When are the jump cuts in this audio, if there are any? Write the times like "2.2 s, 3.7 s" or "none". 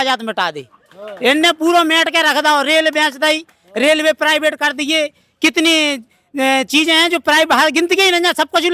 none